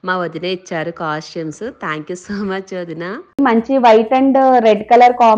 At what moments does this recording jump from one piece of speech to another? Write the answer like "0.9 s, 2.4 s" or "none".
3.4 s